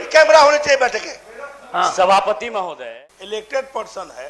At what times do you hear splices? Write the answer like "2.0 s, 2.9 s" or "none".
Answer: 2.7 s